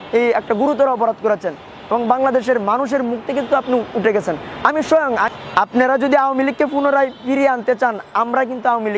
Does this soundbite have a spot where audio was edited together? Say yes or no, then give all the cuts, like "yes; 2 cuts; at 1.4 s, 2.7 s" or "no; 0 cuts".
yes; 1 cut; at 5.3 s